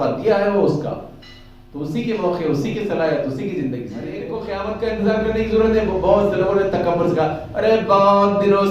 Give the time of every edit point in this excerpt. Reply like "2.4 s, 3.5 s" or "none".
4.4 s